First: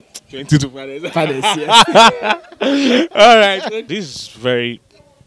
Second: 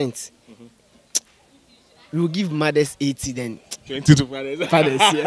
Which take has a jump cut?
first; 1 cut; at 3.9 s

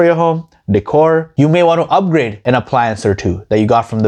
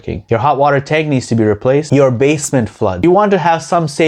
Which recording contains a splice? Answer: second; 2 cuts; at 1.9 s, 3.0 s

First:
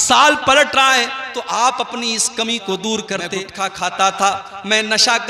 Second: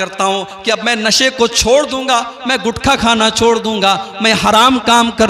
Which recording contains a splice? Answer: first; 1 cut; at 3.4 s

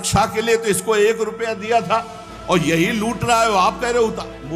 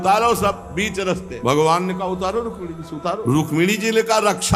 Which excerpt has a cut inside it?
second; 2 cuts; at 1.3 s, 3.2 s

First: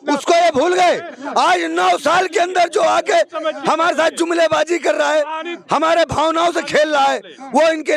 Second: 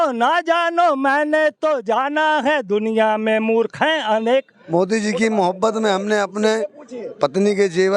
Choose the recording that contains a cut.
second; 1 cut; at 4.6 s

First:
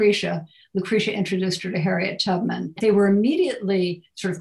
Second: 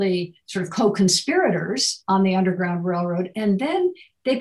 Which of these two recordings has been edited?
first; 1 cut; at 2.8 s

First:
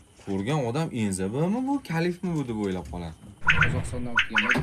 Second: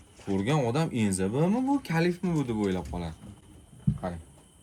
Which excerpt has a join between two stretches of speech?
first; 1 cut; at 3.4 s

